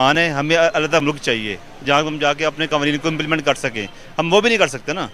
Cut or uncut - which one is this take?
uncut